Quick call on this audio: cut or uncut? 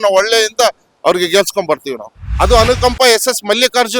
cut